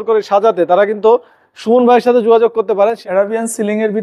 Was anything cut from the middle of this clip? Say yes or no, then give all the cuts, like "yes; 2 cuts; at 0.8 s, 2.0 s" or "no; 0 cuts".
yes; 1 cut; at 3.0 s